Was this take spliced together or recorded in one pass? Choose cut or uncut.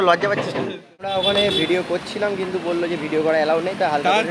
cut